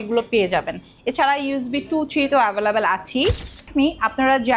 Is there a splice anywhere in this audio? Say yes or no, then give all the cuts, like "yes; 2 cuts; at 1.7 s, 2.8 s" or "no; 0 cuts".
yes; 1 cut; at 3.6 s